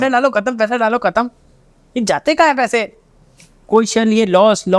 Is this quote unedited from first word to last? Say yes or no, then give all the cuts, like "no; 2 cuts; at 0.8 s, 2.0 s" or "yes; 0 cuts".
yes; 0 cuts